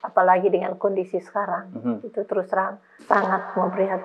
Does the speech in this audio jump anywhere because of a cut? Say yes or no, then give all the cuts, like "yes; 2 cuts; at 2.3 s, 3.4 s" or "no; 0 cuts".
yes; 1 cut; at 3.0 s